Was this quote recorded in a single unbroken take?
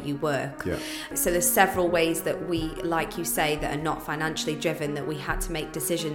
no; 1 cut; at 1.1 s

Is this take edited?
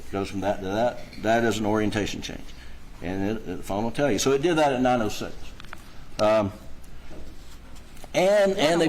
yes; 1 cut; at 7.3 s

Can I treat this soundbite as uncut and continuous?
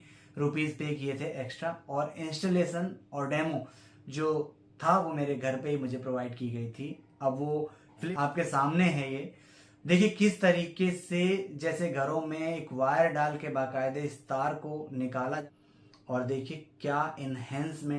no; 2 cuts; at 7.9 s, 15.4 s

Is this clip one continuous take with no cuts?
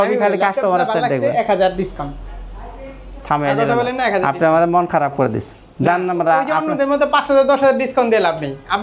yes; 0 cuts

